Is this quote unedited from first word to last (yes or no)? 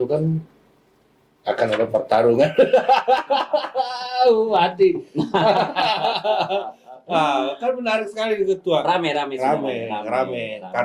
yes